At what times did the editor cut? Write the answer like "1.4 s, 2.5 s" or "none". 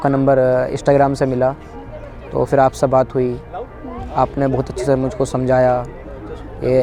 none